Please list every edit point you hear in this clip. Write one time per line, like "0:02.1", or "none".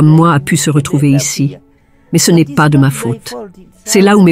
none